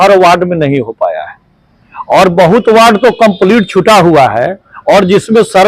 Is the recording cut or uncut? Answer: uncut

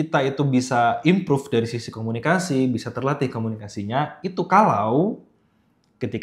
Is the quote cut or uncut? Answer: uncut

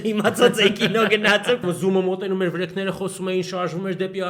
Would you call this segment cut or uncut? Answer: cut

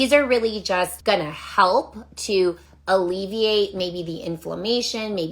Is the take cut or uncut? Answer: cut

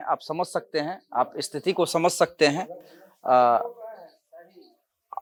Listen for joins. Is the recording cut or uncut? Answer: uncut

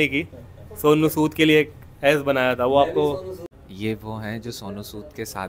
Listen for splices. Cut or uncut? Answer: cut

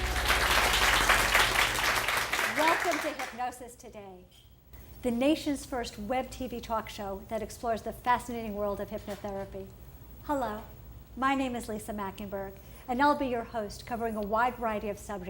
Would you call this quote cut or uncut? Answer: cut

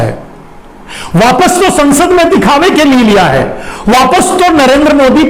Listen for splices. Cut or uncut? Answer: uncut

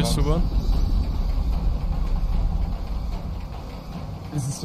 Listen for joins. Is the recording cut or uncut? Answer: uncut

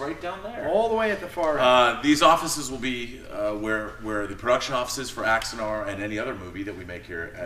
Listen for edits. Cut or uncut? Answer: cut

